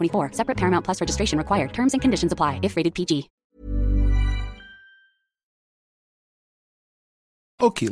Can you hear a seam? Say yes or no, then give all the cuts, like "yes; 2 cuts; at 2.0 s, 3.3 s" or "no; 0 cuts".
no; 0 cuts